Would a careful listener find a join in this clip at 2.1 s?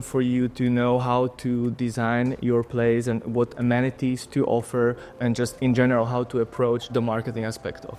no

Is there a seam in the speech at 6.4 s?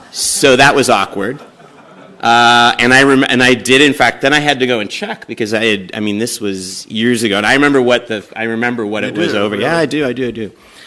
no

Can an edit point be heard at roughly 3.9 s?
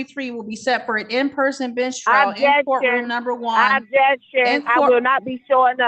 no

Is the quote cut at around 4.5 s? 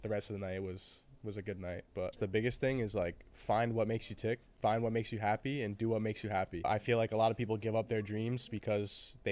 yes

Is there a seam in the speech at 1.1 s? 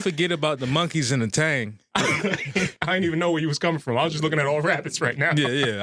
no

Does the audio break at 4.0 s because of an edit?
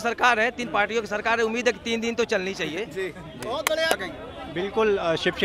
yes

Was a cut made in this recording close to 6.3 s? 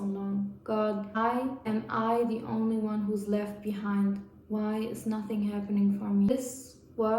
yes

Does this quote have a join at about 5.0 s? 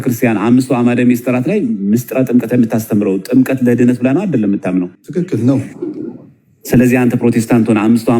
yes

